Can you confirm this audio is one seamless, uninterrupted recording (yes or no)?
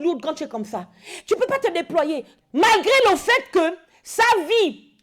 no